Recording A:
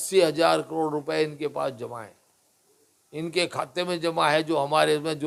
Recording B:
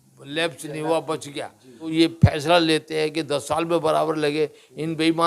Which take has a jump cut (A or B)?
B